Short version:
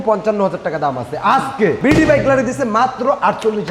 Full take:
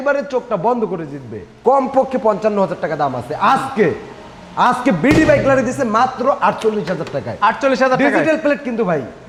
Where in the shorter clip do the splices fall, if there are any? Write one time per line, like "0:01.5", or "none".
0:01.8